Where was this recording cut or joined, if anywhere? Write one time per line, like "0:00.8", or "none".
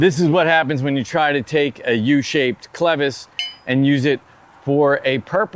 none